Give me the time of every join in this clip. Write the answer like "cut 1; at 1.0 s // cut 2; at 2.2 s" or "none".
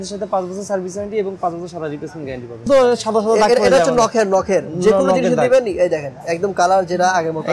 cut 1; at 2.7 s